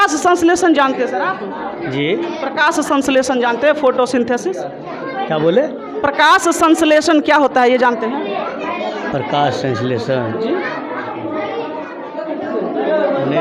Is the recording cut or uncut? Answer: uncut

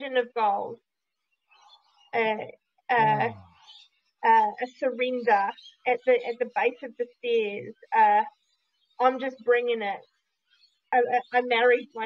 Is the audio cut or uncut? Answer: cut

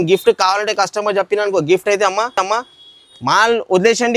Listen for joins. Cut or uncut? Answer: uncut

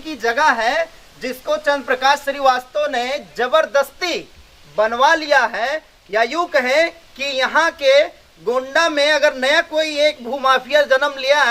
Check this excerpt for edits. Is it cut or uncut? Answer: uncut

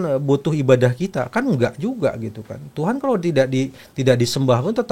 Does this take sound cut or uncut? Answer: uncut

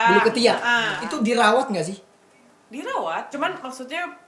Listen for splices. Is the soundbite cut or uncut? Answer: cut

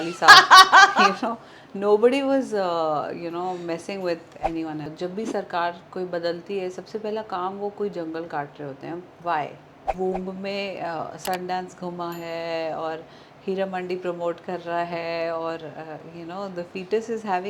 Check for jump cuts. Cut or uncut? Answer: cut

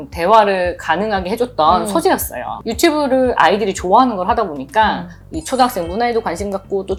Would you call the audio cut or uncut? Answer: uncut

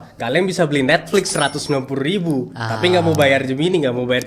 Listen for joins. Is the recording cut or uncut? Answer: uncut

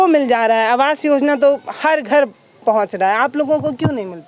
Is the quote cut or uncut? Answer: uncut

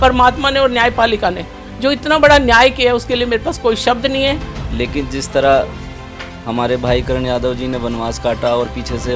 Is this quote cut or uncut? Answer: cut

